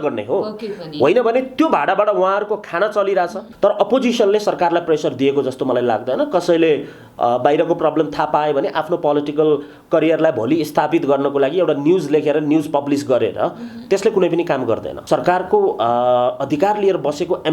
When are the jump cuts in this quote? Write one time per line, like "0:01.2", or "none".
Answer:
0:03.4
0:14.9